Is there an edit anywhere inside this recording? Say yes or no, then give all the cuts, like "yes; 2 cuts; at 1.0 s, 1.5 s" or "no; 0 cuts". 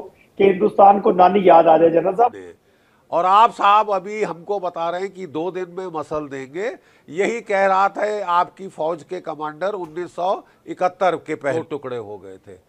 yes; 2 cuts; at 2.3 s, 11.5 s